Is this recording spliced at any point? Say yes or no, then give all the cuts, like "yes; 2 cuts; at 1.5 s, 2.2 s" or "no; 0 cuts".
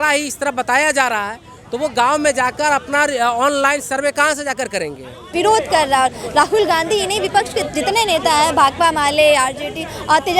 yes; 1 cut; at 5.3 s